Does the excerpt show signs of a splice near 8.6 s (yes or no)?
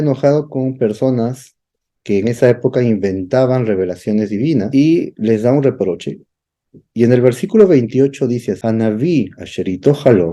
yes